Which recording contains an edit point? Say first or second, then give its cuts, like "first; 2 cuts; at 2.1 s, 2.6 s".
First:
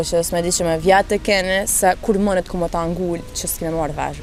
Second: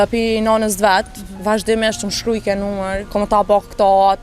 second; 1 cut; at 3.0 s